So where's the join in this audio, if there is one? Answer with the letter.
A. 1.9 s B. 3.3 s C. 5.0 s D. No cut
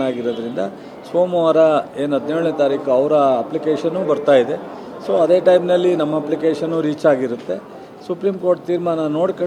D